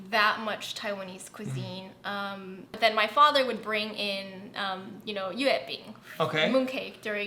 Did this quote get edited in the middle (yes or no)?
yes